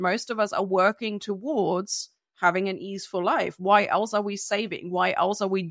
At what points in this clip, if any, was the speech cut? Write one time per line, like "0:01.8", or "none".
none

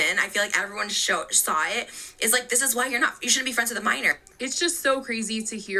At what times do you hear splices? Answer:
none

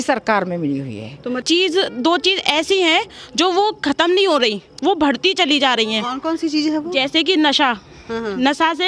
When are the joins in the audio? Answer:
0:01.4

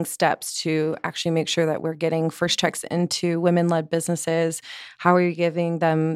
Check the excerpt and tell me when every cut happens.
none

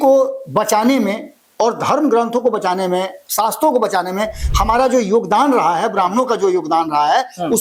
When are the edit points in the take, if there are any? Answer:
none

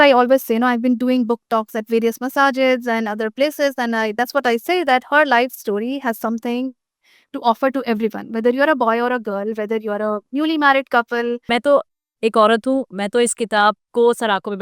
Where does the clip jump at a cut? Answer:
0:11.4

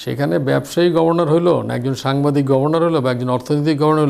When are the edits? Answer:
none

